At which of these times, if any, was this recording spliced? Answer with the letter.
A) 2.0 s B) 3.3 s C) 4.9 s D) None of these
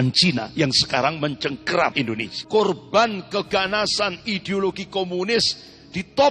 A